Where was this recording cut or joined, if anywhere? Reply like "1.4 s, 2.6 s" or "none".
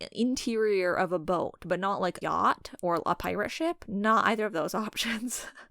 2.2 s